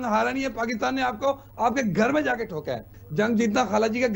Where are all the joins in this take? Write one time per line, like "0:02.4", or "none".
0:02.9